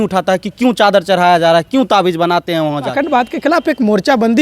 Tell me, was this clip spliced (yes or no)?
yes